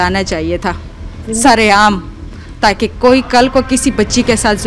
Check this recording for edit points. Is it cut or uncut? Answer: uncut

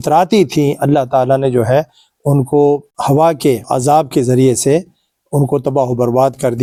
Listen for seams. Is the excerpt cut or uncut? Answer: uncut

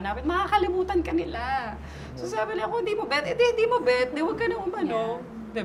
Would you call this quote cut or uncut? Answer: uncut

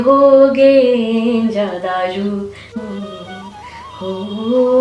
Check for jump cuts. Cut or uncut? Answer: cut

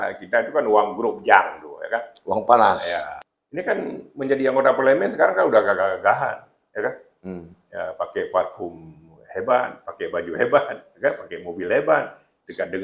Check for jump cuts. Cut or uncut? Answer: cut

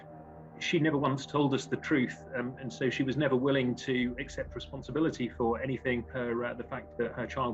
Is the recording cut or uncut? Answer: cut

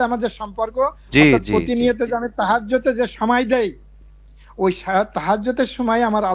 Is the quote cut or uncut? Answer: uncut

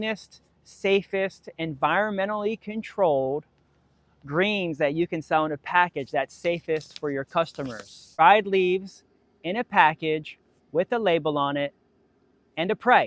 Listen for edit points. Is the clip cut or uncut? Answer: cut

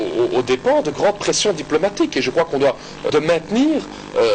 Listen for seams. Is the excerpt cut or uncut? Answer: cut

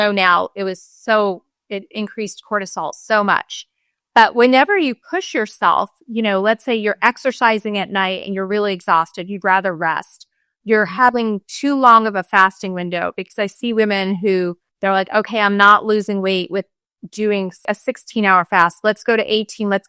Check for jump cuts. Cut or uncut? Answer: cut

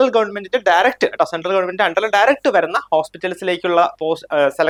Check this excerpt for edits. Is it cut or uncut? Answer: uncut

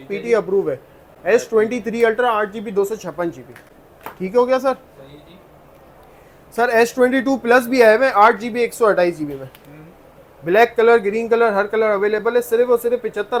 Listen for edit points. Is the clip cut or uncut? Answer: uncut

